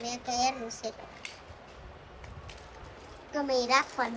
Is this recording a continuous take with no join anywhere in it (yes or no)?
yes